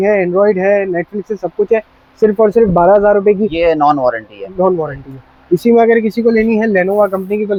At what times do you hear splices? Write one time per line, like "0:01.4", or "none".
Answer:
none